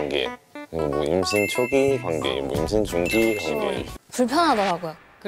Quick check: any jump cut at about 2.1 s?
no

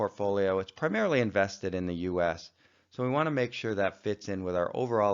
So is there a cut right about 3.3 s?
yes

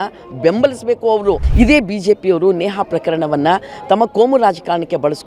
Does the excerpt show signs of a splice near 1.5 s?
yes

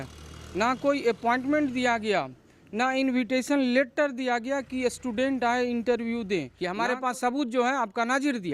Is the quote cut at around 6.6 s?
yes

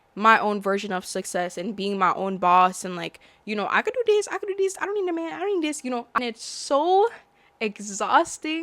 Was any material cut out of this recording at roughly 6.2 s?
yes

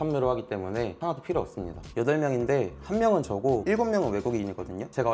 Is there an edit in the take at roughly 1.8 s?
yes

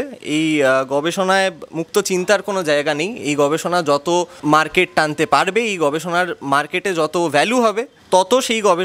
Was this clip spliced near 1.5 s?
no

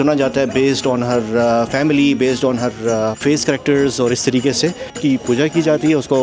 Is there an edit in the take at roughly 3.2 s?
yes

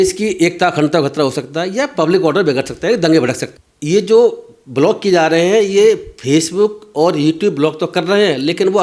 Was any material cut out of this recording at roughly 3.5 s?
yes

